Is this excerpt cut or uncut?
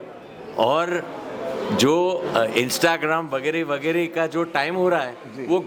uncut